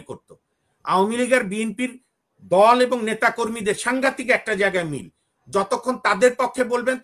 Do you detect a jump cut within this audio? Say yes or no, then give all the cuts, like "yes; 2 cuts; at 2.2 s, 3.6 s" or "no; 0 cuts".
no; 0 cuts